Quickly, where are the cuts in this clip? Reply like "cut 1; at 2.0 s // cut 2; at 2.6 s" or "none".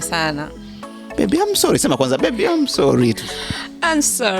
cut 1; at 1.0 s